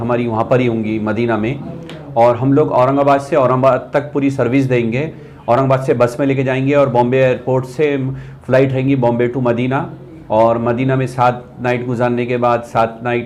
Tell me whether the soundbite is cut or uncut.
uncut